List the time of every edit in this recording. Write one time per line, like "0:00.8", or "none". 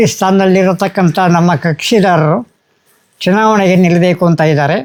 none